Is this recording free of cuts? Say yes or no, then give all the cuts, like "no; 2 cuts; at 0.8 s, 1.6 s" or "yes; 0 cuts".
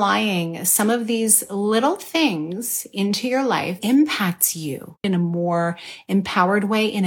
no; 2 cuts; at 3.8 s, 5.0 s